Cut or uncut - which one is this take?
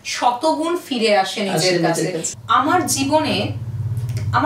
cut